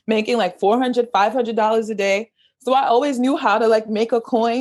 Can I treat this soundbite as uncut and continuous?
yes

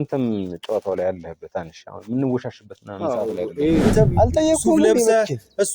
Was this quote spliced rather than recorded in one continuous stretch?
yes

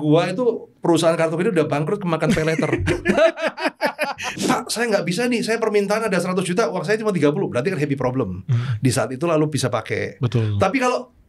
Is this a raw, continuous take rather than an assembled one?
no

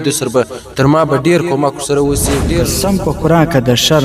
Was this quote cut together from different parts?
yes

